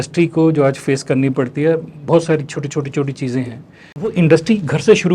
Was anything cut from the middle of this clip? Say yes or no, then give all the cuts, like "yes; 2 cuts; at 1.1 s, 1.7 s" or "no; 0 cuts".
yes; 1 cut; at 4.1 s